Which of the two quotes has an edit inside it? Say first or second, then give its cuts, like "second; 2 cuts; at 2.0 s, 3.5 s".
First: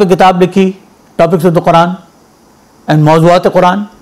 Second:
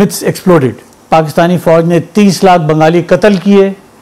second; 1 cut; at 0.9 s